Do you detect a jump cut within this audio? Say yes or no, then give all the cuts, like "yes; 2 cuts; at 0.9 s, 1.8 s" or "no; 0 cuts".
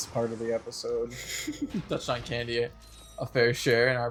no; 0 cuts